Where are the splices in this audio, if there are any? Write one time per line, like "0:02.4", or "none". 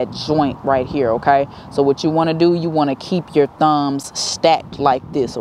none